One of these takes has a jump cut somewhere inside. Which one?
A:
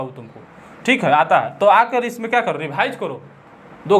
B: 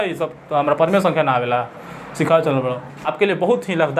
B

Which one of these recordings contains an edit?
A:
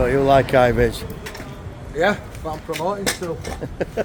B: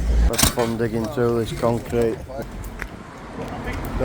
B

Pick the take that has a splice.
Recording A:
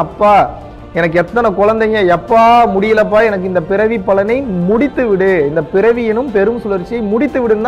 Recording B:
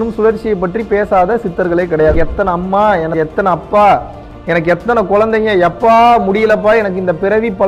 B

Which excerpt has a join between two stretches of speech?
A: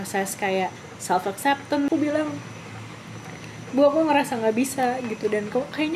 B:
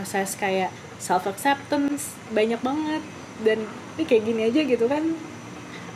A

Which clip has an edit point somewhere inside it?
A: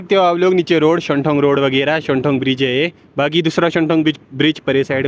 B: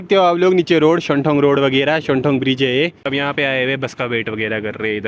B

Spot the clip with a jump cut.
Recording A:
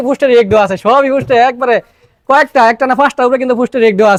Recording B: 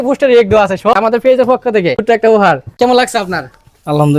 B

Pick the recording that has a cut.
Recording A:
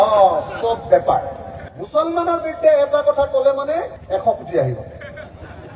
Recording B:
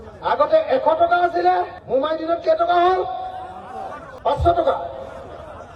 B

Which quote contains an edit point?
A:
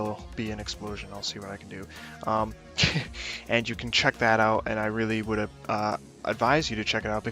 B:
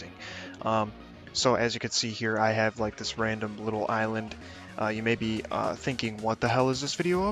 A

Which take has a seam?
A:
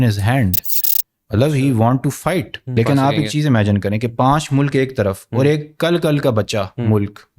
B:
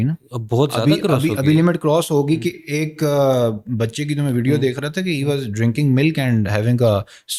A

